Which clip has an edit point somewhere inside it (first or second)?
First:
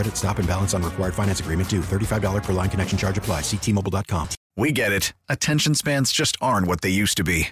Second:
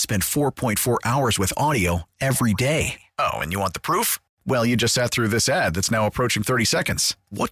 first